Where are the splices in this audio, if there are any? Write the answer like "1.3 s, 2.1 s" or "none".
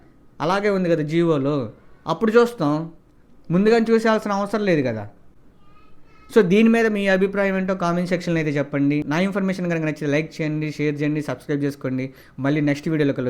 none